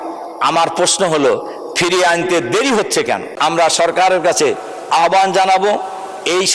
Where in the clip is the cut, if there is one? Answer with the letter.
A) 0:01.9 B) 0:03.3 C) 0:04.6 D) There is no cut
B